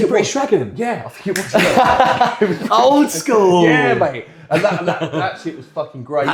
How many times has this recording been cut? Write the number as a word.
zero